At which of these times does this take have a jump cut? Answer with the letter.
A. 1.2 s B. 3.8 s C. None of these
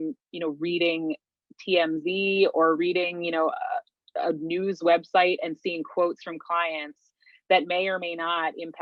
C